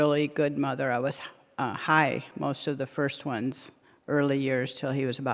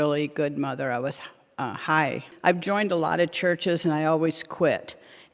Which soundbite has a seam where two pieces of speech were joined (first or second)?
second